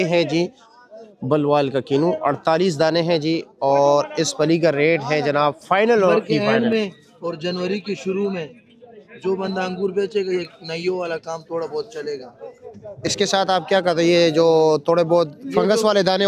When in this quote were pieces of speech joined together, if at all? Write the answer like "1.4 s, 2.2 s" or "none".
6.1 s